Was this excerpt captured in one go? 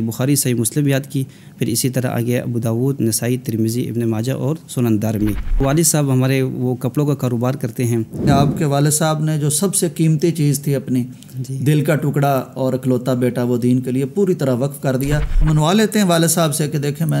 no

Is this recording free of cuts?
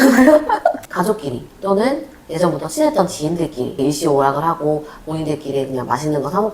no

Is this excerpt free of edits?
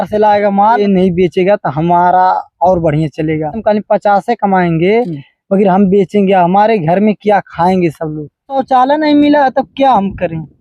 no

